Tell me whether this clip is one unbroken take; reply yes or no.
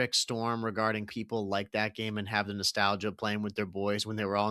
no